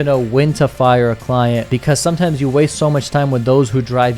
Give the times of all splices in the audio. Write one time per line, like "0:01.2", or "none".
0:01.7